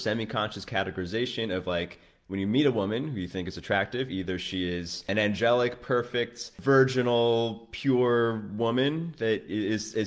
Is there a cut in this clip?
yes; 2 cuts; at 5.1 s, 6.5 s

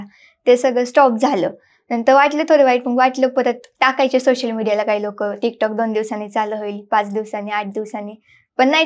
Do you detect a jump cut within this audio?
no; 0 cuts

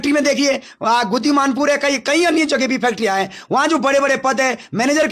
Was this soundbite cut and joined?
no; 0 cuts

